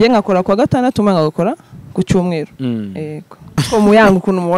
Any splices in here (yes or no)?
yes